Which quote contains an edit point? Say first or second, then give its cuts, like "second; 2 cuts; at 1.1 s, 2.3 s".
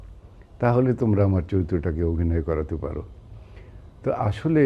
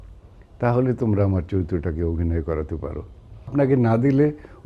second; 1 cut; at 3.5 s